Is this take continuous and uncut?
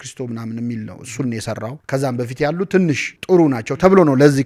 no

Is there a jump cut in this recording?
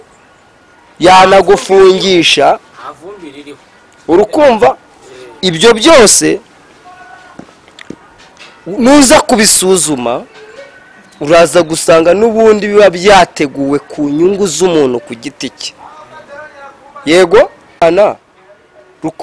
yes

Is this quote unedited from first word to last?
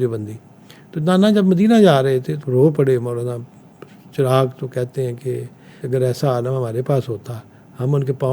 no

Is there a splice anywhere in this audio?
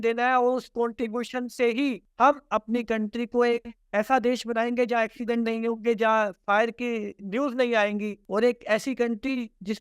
yes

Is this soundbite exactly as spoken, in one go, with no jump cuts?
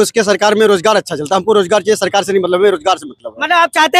yes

